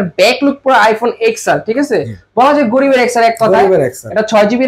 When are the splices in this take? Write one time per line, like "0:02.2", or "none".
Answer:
none